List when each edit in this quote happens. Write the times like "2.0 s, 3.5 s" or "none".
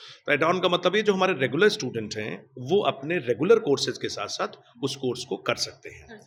none